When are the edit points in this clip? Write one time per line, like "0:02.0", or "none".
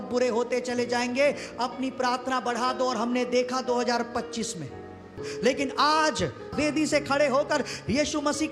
0:06.5